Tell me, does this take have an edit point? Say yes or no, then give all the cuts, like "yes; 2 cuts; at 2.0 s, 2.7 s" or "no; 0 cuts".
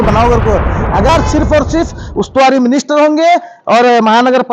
yes; 1 cut; at 1.1 s